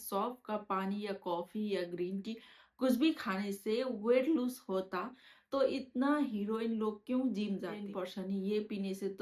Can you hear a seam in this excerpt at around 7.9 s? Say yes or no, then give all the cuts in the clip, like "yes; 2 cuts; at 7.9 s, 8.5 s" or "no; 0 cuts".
yes; 1 cut; at 7.9 s